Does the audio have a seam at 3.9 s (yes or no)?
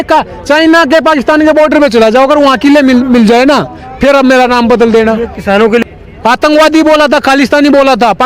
no